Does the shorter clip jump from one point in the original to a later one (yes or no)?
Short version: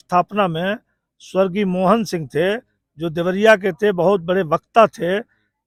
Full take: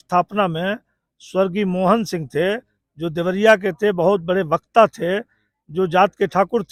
no